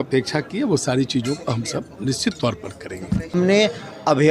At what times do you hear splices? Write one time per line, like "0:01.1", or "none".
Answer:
0:03.3